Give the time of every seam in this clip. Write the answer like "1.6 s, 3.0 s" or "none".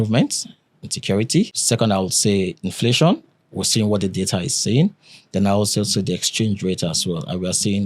1.6 s